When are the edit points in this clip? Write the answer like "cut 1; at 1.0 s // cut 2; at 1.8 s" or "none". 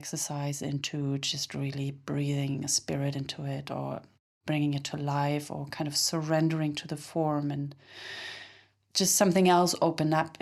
none